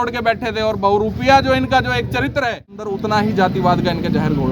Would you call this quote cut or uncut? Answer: cut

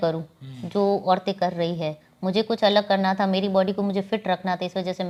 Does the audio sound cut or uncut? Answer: uncut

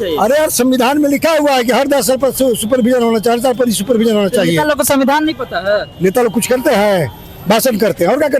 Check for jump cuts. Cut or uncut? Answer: uncut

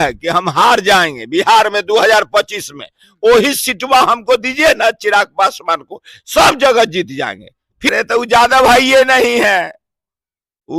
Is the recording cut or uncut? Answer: cut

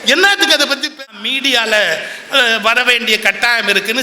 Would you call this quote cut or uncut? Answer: cut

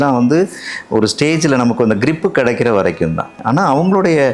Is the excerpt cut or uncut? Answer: cut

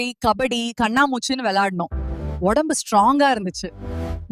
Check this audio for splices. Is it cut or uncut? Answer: uncut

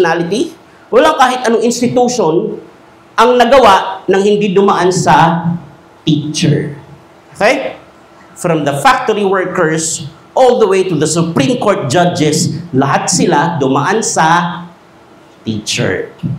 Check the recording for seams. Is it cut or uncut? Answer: uncut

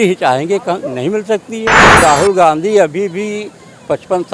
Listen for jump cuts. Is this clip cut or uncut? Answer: cut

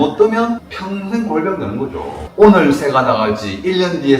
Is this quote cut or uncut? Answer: cut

